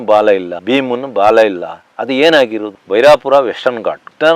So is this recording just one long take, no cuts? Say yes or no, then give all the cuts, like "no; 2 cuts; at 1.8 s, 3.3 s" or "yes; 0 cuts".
no; 1 cut; at 2.7 s